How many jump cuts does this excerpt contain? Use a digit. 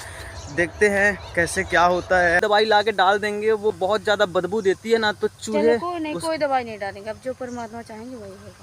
1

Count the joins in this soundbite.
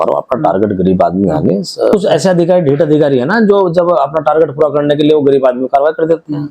1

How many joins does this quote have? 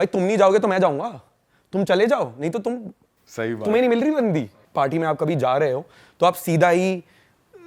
1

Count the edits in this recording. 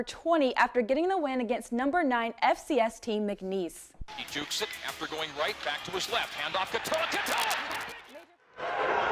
1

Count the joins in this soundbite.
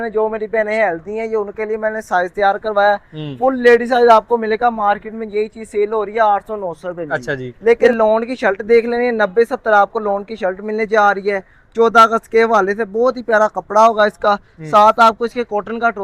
1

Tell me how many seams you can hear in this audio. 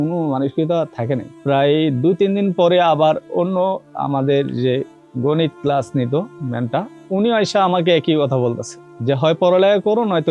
1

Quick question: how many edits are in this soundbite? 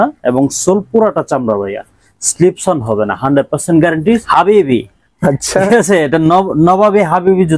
1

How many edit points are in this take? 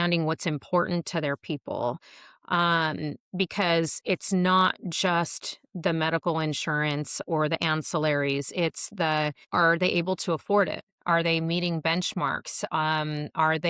0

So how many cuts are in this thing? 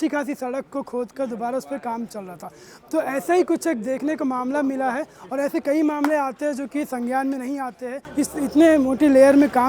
1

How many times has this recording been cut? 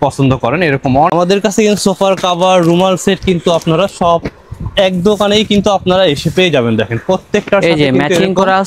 1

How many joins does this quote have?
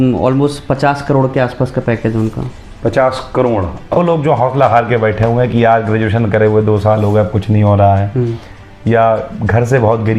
1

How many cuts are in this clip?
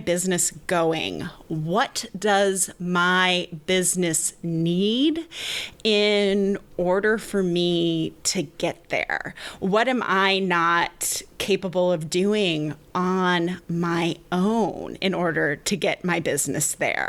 1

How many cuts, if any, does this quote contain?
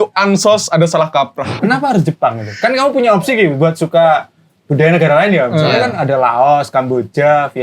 1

